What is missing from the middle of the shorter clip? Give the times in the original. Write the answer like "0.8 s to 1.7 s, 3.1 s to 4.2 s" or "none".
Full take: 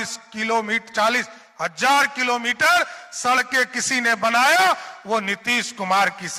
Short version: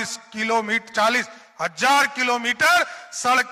none